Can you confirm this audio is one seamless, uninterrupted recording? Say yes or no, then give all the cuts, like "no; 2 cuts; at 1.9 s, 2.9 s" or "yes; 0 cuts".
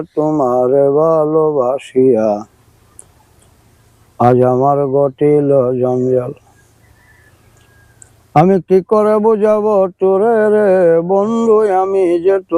yes; 0 cuts